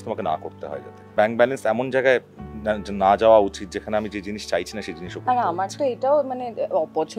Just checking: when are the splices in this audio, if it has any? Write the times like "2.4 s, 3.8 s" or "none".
1.1 s